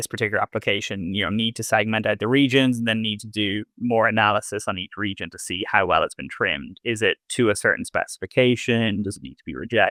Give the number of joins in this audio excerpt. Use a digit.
0